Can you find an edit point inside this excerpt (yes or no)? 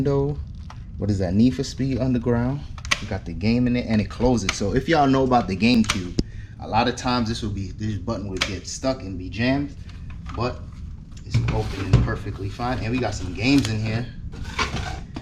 no